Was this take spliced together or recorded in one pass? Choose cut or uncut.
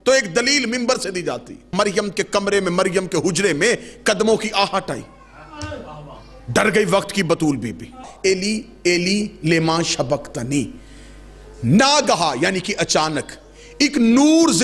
cut